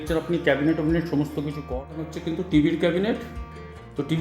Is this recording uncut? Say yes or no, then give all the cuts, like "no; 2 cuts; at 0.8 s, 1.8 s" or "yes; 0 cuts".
no; 1 cut; at 1.7 s